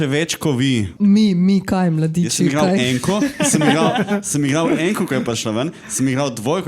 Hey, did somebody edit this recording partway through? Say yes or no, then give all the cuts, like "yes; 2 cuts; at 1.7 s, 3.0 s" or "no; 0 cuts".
yes; 1 cut; at 0.9 s